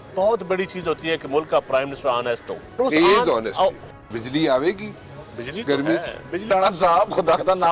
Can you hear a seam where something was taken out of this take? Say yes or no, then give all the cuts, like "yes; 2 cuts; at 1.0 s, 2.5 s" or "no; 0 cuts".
yes; 3 cuts; at 2.8 s, 3.8 s, 6.5 s